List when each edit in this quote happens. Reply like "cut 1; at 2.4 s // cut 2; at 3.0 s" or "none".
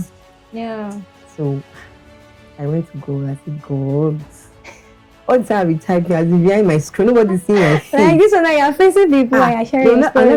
none